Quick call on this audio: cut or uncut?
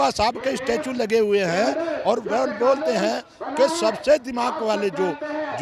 uncut